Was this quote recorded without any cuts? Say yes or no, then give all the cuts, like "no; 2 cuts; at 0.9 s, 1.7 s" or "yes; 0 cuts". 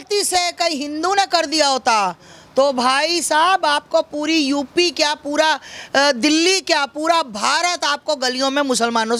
yes; 0 cuts